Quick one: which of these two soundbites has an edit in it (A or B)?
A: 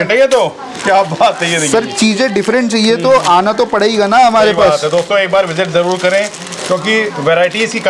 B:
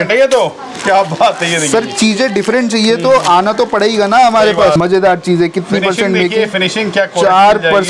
B